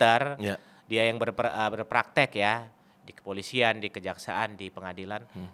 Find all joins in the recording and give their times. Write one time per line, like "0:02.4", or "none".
none